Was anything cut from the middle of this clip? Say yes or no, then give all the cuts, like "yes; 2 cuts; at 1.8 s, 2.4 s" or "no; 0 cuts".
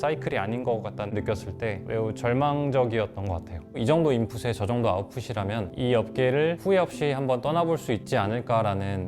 yes; 2 cuts; at 1.1 s, 3.6 s